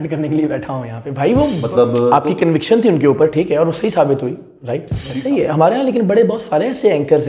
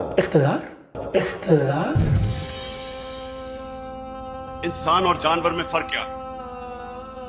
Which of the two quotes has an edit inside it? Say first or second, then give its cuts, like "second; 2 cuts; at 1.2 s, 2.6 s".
first; 2 cuts; at 1.6 s, 5.1 s